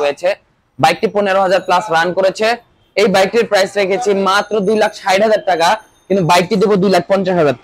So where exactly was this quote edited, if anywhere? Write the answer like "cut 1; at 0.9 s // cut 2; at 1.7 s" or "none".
none